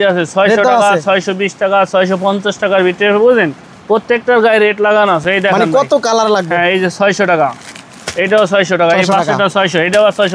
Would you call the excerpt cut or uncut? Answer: uncut